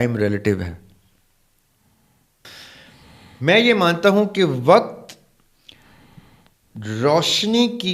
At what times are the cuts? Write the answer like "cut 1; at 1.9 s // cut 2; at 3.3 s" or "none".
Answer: cut 1; at 2.4 s

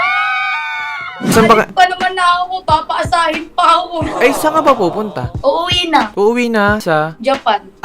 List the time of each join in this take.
cut 1; at 1.3 s

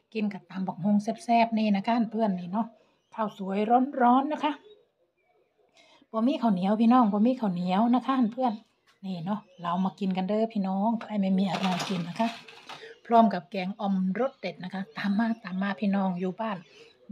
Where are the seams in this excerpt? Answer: none

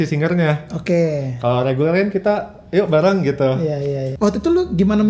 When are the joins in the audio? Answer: cut 1; at 4.1 s

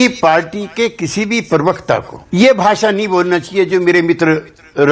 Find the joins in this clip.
none

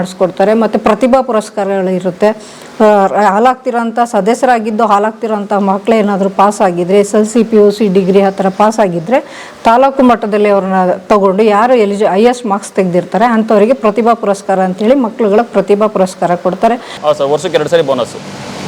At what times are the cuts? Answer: cut 1; at 17.0 s

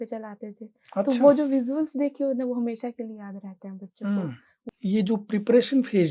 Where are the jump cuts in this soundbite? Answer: cut 1; at 4.5 s

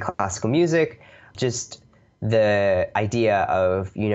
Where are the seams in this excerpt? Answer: cut 1; at 1.2 s

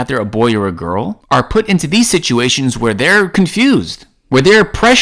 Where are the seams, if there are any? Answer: cut 1; at 1.2 s

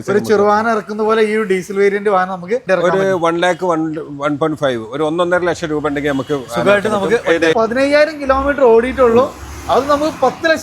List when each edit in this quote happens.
cut 1; at 2.6 s // cut 2; at 7.5 s

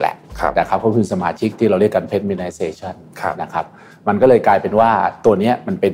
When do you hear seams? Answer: cut 1; at 1.5 s

